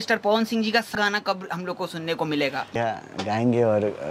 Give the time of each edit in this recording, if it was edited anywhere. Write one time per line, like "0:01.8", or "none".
0:02.7